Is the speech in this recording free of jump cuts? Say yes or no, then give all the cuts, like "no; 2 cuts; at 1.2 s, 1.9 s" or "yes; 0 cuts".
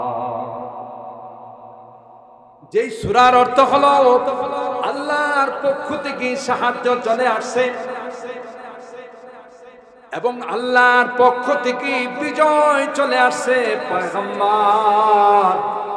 yes; 0 cuts